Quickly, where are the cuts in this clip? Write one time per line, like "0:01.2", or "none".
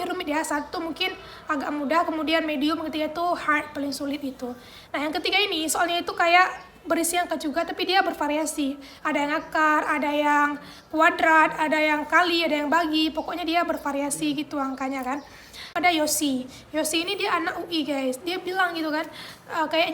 0:15.3